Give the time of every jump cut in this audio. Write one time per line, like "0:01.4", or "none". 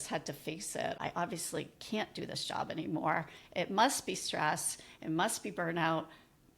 0:01.0